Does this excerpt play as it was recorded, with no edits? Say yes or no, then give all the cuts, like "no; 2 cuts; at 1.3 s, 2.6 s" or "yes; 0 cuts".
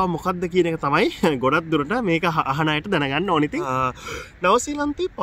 yes; 0 cuts